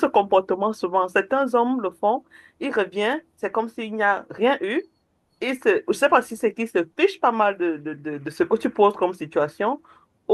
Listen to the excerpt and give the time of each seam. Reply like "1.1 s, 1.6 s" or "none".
none